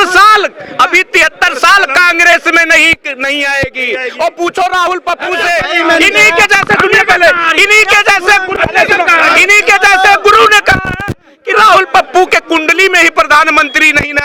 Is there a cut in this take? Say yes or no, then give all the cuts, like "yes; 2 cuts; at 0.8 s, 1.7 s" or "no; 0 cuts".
no; 0 cuts